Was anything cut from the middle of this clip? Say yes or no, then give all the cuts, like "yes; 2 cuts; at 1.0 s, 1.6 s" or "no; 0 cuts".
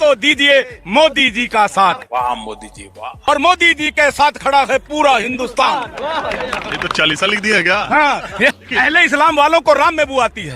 yes; 2 cuts; at 3.0 s, 8.6 s